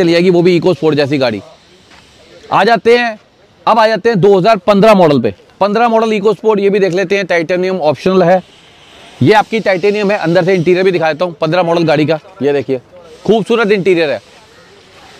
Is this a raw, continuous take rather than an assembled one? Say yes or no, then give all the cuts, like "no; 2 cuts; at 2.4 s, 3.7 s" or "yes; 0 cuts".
yes; 0 cuts